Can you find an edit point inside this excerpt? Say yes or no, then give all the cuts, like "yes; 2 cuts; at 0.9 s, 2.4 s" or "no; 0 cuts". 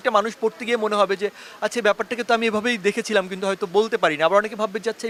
no; 0 cuts